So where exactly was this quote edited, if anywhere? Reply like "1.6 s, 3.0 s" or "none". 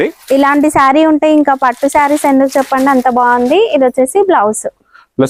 none